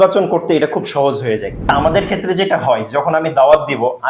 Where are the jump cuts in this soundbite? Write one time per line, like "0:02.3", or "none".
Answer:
0:01.5